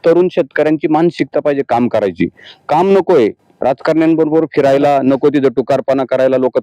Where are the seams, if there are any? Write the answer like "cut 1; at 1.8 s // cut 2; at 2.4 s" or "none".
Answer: none